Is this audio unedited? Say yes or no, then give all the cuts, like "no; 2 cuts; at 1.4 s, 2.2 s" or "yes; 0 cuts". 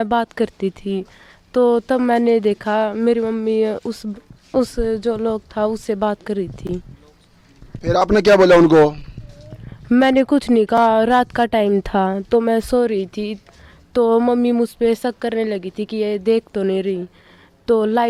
yes; 0 cuts